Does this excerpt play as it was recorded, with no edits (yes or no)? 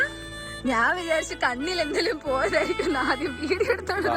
yes